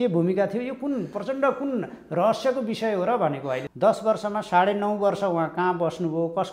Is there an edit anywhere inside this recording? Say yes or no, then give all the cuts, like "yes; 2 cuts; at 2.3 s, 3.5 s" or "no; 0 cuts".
yes; 1 cut; at 3.6 s